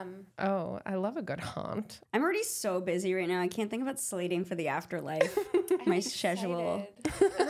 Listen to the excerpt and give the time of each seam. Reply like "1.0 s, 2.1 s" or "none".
2.0 s